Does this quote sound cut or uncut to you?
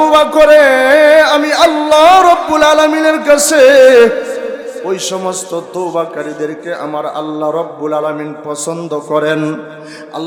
uncut